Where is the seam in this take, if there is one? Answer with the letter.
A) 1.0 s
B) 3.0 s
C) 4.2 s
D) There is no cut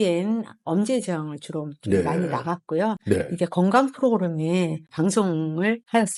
D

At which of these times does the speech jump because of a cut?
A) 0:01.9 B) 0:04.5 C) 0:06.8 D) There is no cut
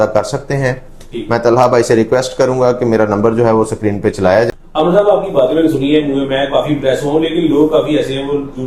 B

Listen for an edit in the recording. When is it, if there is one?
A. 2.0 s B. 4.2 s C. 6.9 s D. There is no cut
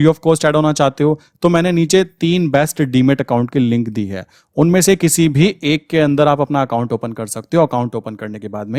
D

